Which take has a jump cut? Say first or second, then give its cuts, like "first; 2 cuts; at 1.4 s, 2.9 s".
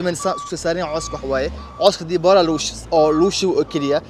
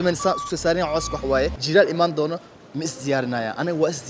second; 1 cut; at 1.6 s